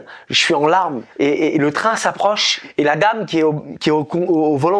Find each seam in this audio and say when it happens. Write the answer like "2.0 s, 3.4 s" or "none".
1.0 s, 2.5 s